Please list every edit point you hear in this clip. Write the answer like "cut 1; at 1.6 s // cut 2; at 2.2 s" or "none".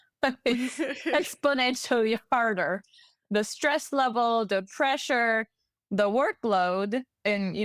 none